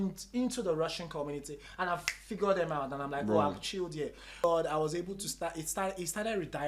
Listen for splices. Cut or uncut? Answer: cut